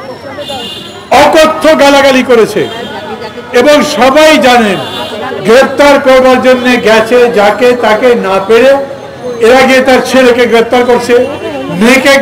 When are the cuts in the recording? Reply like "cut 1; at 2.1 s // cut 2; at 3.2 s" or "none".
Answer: none